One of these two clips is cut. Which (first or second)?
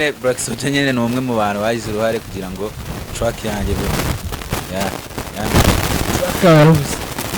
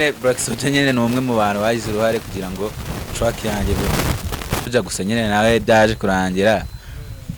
second